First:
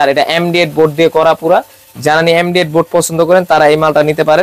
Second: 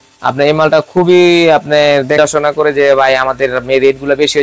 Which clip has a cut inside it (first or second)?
second